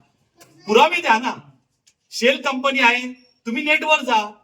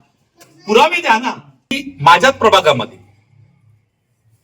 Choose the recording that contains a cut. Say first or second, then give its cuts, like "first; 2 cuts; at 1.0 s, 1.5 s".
second; 1 cut; at 1.9 s